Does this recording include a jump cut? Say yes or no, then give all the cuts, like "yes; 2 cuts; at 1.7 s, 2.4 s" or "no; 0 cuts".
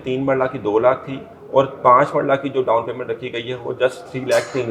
no; 0 cuts